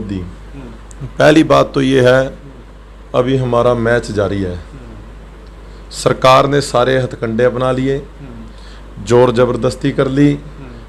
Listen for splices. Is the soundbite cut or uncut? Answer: uncut